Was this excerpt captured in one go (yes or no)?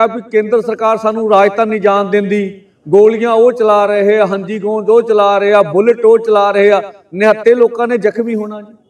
yes